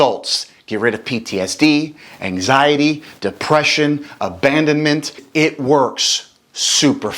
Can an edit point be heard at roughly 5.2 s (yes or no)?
yes